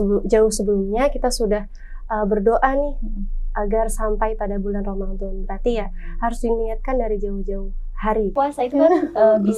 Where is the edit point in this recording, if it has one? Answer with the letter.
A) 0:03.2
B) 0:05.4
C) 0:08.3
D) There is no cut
C